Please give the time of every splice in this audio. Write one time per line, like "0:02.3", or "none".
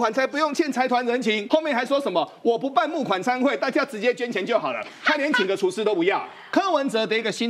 0:01.4
0:06.3